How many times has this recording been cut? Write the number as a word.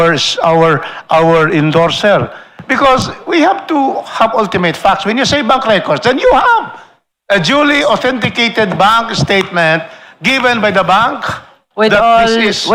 zero